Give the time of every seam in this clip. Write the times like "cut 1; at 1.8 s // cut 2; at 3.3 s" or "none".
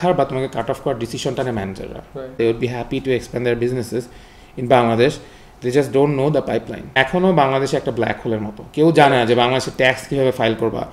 cut 1; at 2.3 s // cut 2; at 6.9 s